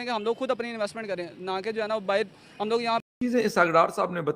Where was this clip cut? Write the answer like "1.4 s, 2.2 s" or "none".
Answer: 3.0 s